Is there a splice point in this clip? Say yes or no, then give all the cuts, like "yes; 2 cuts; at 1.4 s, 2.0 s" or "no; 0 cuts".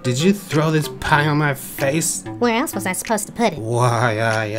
yes; 2 cuts; at 2.2 s, 3.6 s